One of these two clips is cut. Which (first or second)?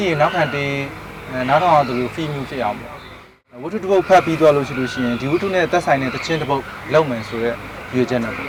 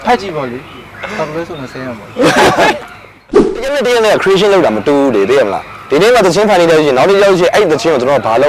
second